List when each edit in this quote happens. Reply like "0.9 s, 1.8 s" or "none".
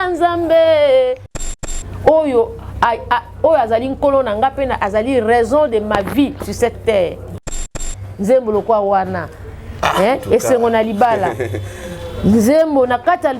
1.6 s, 7.7 s